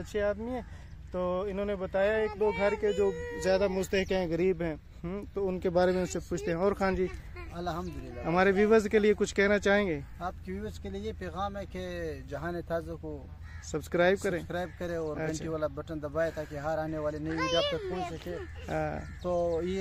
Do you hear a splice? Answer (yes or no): no